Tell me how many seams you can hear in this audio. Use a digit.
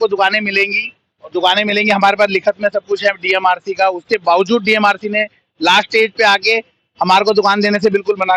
0